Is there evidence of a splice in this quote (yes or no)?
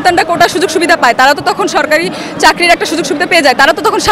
no